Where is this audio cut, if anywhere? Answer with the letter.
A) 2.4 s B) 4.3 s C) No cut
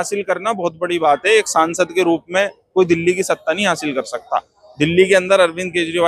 C